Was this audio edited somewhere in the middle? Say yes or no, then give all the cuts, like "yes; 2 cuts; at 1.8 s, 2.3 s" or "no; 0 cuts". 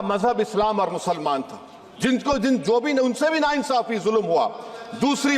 no; 0 cuts